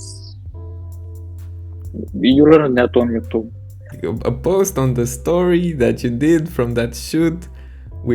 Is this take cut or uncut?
cut